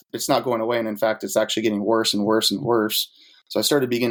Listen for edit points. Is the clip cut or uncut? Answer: uncut